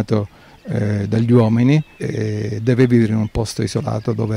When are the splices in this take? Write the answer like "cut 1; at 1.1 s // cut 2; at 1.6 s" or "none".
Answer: cut 1; at 2.0 s